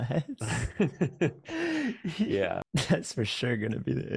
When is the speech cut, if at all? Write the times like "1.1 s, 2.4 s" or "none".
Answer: 2.6 s